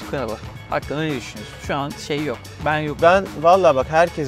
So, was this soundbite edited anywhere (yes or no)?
no